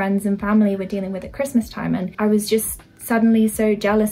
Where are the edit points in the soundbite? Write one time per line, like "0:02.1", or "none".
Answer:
0:02.1